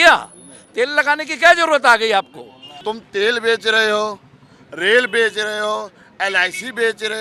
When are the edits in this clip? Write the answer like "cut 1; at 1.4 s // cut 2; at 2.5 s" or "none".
cut 1; at 2.8 s